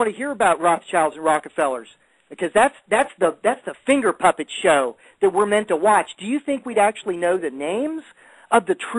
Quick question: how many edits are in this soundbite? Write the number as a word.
one